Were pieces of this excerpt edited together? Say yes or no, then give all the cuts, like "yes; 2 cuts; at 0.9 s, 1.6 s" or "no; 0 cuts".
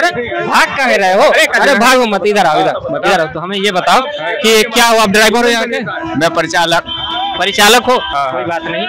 no; 0 cuts